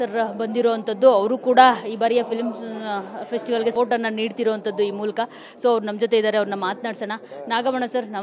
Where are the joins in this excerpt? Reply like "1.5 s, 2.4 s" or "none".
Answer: 3.7 s